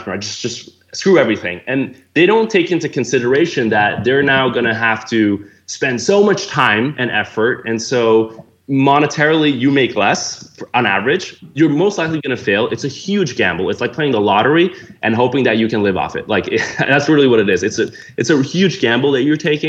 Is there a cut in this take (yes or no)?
no